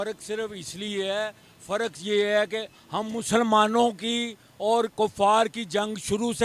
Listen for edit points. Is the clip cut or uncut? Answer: uncut